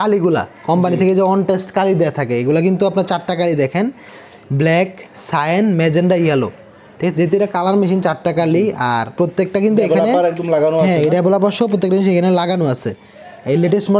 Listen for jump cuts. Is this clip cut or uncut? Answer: uncut